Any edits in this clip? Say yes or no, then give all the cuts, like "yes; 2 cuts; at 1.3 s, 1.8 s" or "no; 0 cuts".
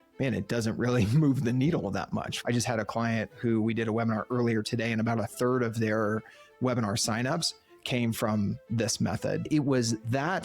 yes; 2 cuts; at 2.3 s, 9.5 s